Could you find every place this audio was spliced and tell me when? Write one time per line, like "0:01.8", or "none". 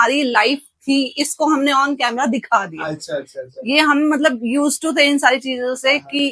none